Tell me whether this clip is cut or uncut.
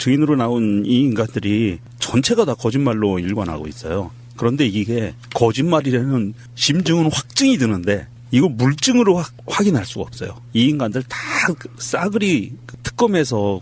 uncut